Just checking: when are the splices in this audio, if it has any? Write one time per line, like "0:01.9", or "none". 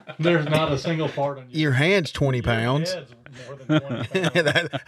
none

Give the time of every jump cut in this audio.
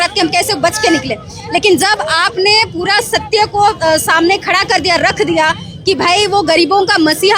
none

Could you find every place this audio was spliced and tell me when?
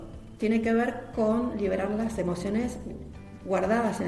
0:03.2

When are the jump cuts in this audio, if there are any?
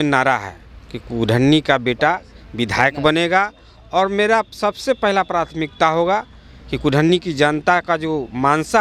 none

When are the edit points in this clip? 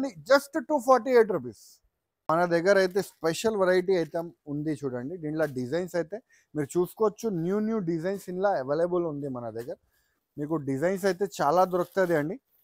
0:02.2

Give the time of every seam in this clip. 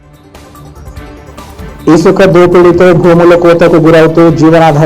0:01.1

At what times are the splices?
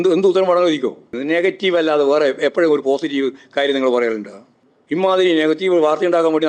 0:01.1

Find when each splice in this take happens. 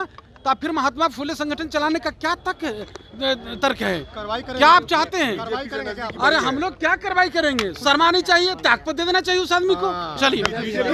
none

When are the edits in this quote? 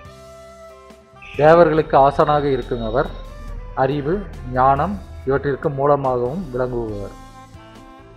0:01.2

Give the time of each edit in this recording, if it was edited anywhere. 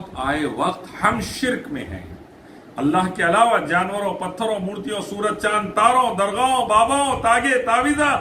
none

